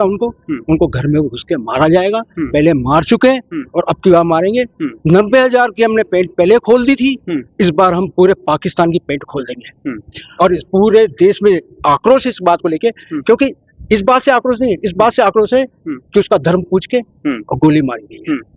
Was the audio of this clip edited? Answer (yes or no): no